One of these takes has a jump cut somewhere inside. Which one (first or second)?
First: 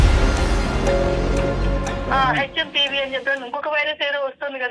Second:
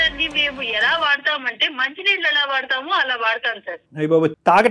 first